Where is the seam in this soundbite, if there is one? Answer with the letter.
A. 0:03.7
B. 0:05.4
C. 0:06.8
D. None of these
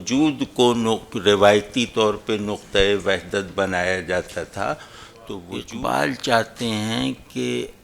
B